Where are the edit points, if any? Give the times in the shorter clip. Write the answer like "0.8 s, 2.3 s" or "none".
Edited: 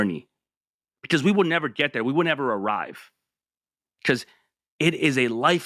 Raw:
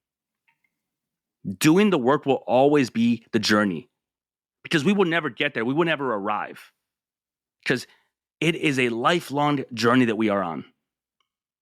none